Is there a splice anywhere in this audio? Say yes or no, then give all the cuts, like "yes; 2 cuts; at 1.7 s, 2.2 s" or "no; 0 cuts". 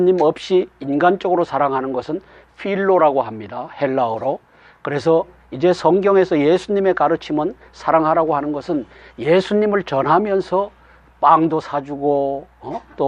no; 0 cuts